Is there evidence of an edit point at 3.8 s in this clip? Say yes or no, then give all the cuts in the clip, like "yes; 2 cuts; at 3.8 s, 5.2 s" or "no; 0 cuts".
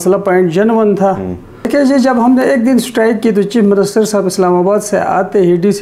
no; 1 cut; at 1.7 s